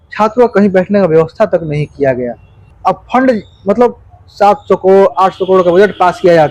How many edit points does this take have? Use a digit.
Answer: 1